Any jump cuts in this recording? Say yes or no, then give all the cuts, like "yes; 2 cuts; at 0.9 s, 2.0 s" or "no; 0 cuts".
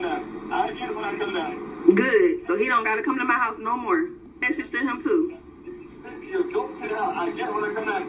yes; 1 cut; at 4.3 s